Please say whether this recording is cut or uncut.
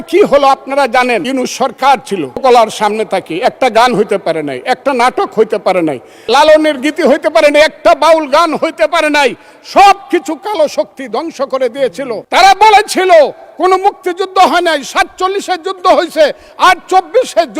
cut